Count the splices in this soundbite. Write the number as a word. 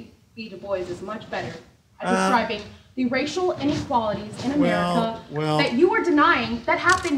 zero